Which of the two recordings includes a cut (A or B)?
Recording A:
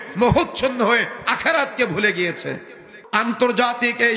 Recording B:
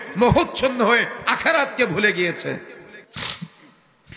A